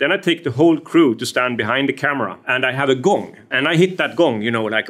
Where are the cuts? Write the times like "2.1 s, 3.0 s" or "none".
2.4 s, 3.4 s

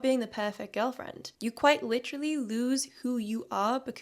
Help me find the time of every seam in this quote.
1.2 s

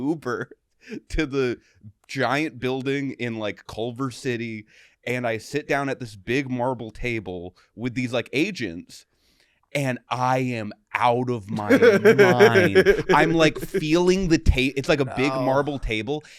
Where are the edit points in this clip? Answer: none

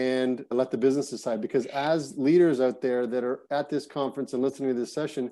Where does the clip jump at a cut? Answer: none

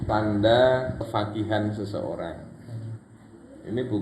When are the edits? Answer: 1.1 s

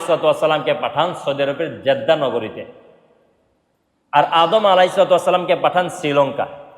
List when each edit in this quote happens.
none

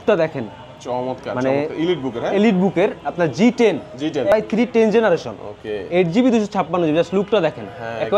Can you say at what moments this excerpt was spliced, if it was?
4.3 s

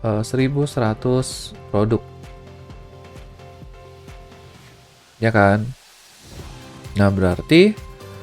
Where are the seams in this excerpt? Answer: 2.0 s, 5.1 s

